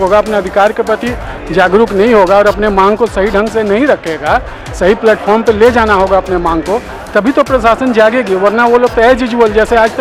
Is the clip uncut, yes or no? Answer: yes